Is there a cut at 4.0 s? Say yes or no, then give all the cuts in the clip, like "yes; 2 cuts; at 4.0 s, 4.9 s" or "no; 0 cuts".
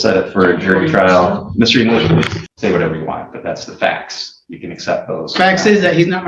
no; 1 cut; at 2.4 s